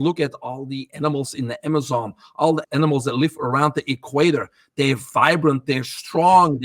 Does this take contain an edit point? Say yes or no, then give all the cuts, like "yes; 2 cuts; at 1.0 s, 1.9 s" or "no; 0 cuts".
no; 0 cuts